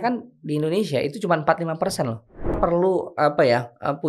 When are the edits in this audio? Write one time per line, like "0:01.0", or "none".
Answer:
0:02.6